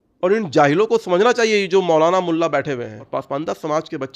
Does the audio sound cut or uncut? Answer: cut